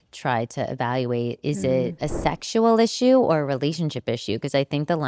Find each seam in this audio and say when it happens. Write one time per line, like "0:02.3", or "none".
0:02.0